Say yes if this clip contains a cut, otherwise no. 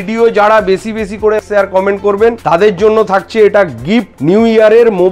yes